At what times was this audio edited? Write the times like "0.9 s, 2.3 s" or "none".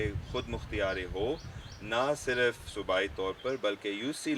none